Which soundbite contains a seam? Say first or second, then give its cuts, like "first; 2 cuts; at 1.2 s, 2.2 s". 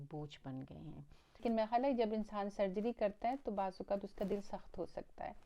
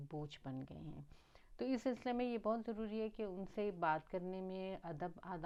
first; 1 cut; at 1.4 s